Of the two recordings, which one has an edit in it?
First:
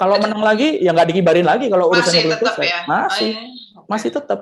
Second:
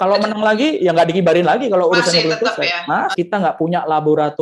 second; 1 cut; at 3.1 s

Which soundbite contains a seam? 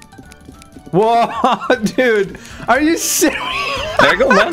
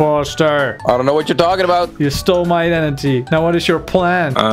second; 1 cut; at 1.9 s

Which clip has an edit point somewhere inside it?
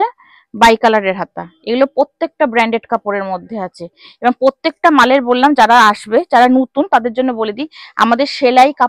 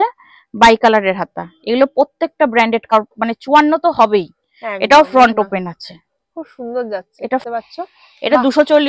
second; 2 cuts; at 2.9 s, 7.4 s

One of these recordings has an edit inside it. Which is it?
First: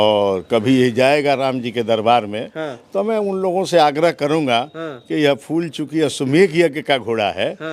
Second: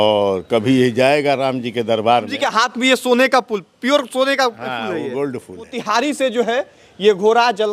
second; 2 cuts; at 2.5 s, 5.8 s

